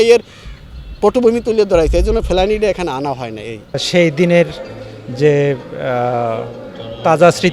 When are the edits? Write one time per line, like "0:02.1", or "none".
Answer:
0:03.8